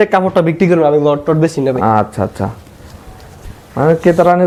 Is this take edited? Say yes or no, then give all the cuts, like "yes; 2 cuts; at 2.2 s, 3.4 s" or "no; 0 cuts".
no; 0 cuts